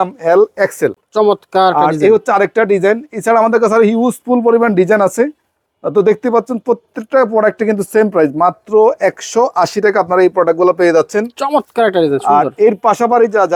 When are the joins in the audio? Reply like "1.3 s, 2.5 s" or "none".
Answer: none